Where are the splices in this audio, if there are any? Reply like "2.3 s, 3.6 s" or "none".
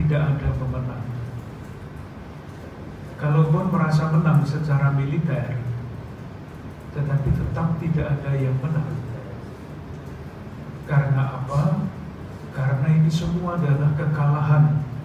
none